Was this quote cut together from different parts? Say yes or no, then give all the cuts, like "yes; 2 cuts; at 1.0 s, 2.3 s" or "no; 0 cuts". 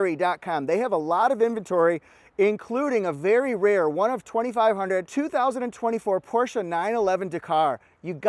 yes; 1 cut; at 5.1 s